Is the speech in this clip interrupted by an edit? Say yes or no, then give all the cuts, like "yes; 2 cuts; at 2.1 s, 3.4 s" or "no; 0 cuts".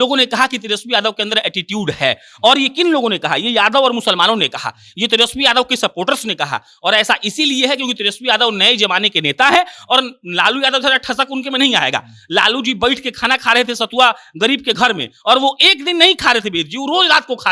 no; 0 cuts